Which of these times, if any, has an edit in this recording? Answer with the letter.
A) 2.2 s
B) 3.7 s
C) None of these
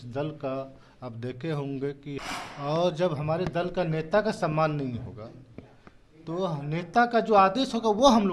A